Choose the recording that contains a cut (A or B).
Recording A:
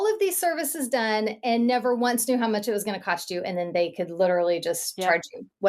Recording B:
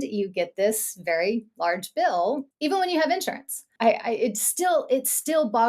B